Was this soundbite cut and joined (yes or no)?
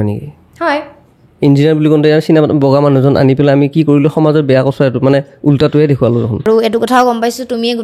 yes